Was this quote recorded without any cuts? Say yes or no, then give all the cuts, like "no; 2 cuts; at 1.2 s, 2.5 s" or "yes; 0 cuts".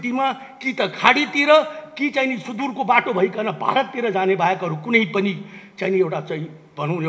yes; 0 cuts